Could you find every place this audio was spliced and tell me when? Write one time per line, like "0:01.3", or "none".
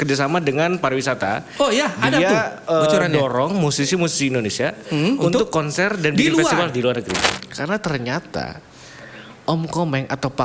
0:07.3